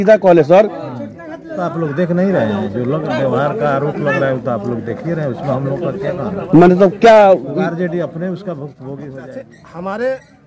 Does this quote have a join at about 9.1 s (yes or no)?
yes